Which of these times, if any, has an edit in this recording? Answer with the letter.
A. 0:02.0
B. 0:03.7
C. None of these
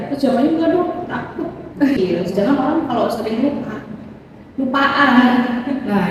A